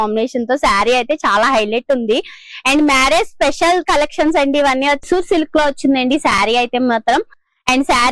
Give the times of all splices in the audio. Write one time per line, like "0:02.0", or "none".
0:05.0